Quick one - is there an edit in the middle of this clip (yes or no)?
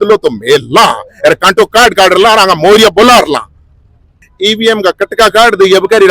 yes